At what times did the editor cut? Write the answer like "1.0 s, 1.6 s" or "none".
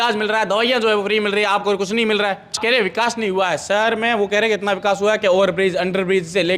2.5 s